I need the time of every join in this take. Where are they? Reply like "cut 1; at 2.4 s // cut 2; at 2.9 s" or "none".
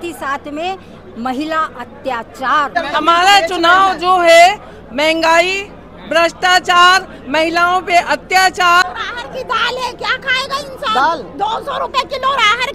cut 1; at 2.7 s // cut 2; at 8.8 s